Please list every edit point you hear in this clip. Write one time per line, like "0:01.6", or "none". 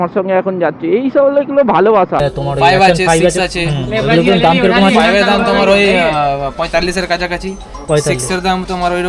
0:01.9